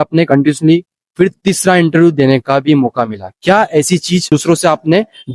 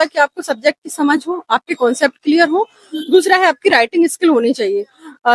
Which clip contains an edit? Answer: first; 1 cut; at 4.3 s

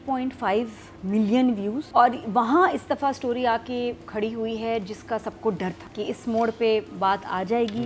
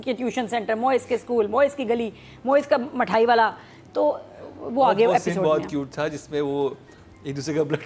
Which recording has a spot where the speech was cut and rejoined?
first; 2 cuts; at 1.8 s, 5.8 s

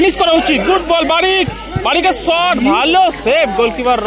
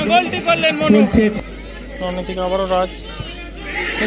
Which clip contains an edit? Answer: second; 1 cut; at 1.4 s

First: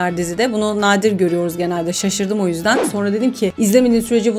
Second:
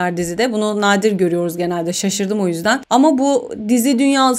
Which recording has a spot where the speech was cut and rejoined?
first; 1 cut; at 2.8 s

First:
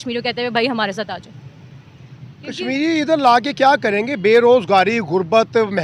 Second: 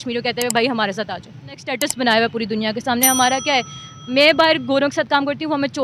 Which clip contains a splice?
second; 1 cut; at 1.7 s

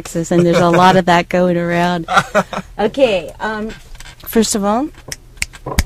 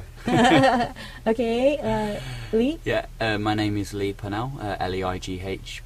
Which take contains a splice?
first; 1 cut; at 3.0 s

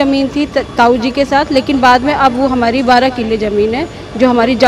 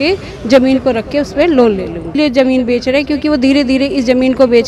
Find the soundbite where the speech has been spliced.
second; 1 cut; at 2.2 s

